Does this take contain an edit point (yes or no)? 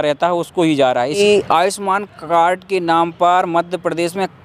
yes